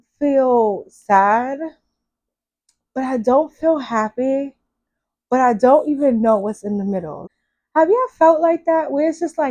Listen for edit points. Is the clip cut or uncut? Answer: cut